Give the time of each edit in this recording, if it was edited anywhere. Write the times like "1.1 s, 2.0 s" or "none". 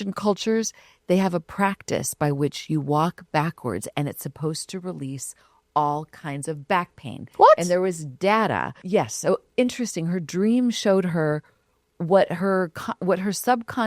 8.7 s